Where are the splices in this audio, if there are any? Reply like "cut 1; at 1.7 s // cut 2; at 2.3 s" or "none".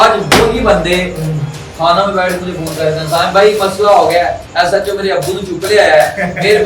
none